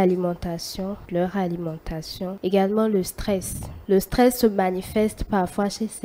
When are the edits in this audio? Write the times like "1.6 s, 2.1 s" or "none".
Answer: none